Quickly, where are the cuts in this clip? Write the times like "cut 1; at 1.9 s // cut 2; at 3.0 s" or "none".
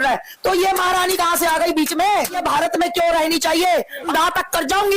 cut 1; at 2.4 s